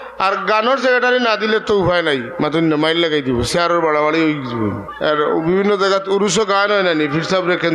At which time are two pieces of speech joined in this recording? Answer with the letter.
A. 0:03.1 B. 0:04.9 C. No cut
B